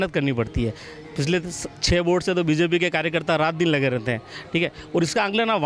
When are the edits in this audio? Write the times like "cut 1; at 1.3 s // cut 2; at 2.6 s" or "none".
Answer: none